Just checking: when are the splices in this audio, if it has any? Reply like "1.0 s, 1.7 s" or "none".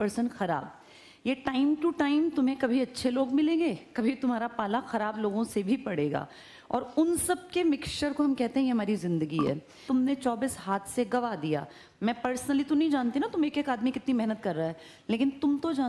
9.8 s